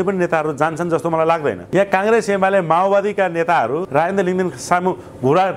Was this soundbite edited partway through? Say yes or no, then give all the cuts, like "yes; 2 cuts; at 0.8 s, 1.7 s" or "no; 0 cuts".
yes; 2 cuts; at 1.6 s, 3.9 s